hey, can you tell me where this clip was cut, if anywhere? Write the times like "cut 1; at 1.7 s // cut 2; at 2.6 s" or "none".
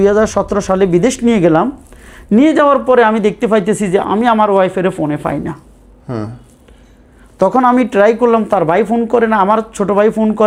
none

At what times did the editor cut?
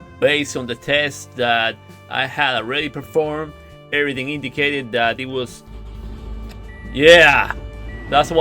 cut 1; at 5.6 s

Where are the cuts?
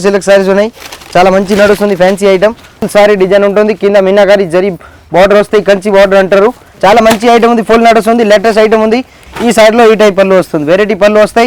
cut 1; at 2.9 s // cut 2; at 6.7 s // cut 3; at 9.2 s

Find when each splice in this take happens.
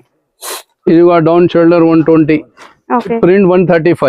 cut 1; at 3.2 s

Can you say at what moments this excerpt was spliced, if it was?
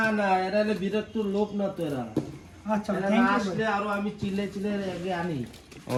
none

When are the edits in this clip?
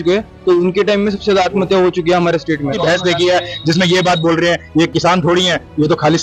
cut 1; at 2.8 s

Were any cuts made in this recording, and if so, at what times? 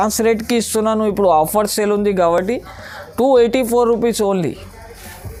none

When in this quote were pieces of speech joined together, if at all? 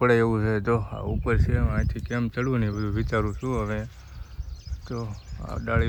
none

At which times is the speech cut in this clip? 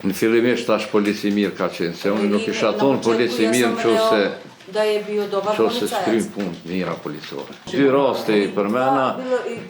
cut 1; at 7.7 s

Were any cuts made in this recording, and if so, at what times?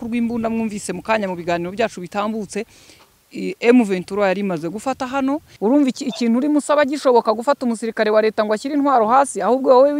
cut 1; at 5.5 s

